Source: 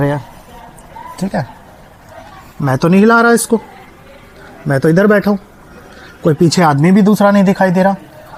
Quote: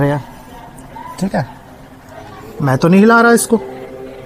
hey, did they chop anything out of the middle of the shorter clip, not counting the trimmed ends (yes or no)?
no